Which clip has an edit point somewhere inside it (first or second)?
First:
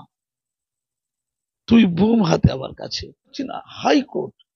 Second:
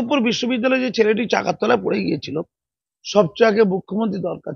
first